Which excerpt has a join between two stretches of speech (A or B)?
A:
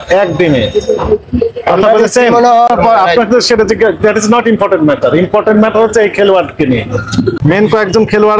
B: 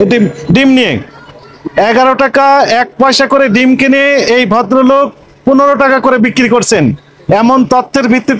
A